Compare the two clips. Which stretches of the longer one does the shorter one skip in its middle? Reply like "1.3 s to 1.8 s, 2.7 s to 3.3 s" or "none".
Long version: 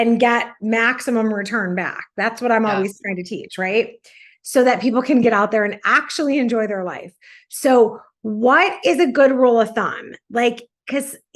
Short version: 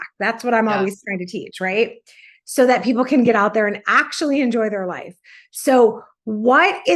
none

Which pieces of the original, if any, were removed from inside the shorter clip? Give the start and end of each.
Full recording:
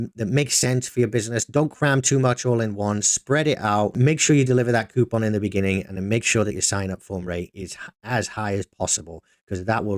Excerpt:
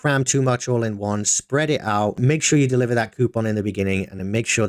none

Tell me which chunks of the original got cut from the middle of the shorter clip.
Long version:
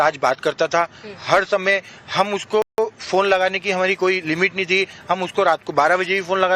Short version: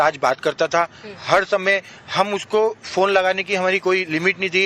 2.6 s to 2.8 s

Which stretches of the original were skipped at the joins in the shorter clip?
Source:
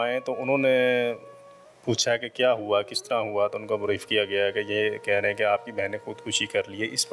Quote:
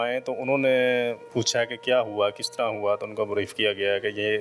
1.2 s to 1.7 s

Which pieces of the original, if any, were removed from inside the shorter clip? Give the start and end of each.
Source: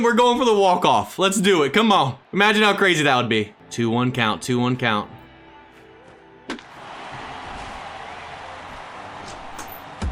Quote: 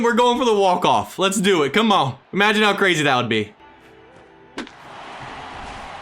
3.6 s to 5.5 s

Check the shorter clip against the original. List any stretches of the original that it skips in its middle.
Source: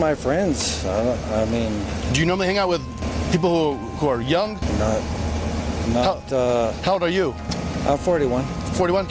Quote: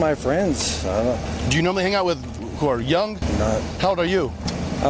1.2 s to 1.9 s, 3.1 s to 3.8 s, 5.1 s to 6.8 s

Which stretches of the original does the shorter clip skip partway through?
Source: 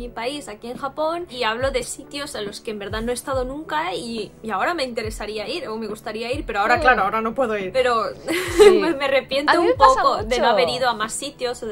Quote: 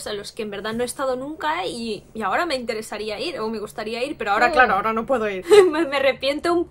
7.7 s to 8.5 s

